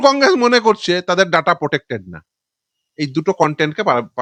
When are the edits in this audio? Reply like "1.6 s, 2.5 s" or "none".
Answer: none